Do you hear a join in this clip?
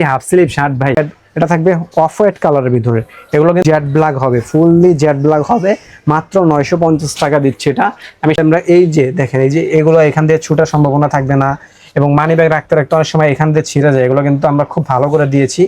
yes; 3 cuts; at 1.0 s, 3.6 s, 8.4 s

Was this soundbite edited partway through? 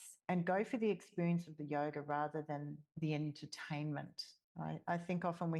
yes; 1 cut; at 4.5 s

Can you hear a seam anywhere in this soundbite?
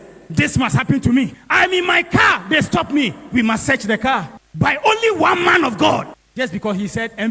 yes; 1 cut; at 1.4 s

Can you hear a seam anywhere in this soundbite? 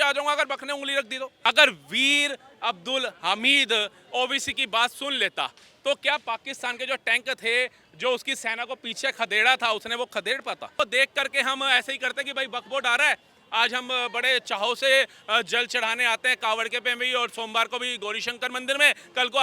yes; 2 cuts; at 1.3 s, 10.7 s

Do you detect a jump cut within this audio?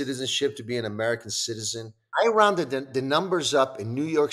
yes; 1 cut; at 2.1 s

